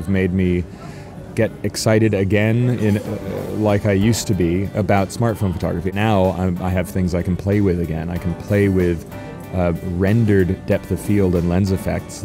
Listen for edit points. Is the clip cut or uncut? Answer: cut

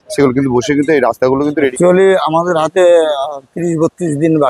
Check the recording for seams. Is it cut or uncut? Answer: cut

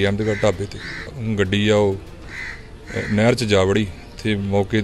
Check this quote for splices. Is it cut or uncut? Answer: cut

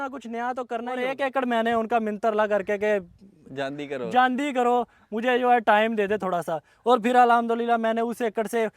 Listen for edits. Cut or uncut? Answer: cut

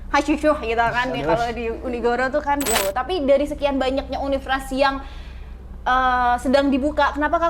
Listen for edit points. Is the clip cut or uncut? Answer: cut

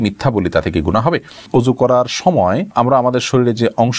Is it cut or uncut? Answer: cut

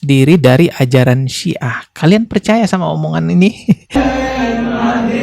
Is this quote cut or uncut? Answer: cut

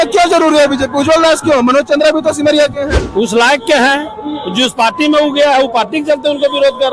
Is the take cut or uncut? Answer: uncut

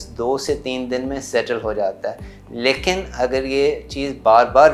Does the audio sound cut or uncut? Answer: uncut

